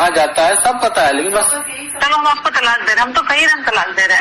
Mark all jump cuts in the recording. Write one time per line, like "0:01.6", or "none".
0:01.9